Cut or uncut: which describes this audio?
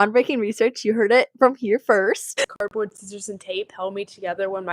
cut